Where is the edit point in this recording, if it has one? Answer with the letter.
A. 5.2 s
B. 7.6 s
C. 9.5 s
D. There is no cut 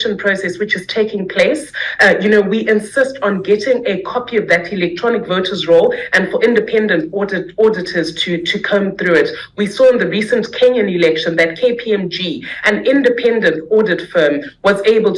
D